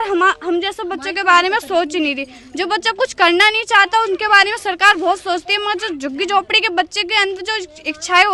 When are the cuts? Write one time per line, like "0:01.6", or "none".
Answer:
none